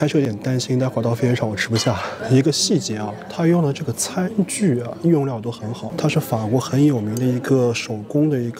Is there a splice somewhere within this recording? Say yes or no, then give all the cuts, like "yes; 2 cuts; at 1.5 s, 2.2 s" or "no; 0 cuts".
no; 0 cuts